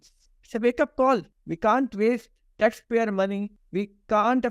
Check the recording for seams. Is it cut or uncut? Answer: uncut